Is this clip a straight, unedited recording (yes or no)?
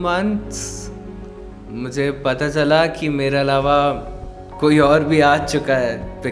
yes